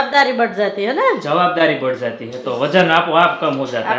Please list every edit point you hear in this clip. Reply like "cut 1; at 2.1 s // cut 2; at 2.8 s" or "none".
none

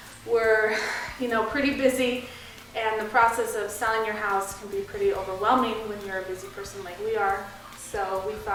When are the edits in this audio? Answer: none

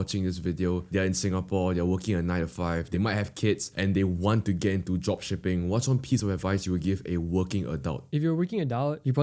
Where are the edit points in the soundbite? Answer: none

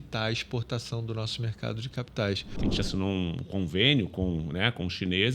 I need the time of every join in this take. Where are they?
cut 1; at 2.5 s

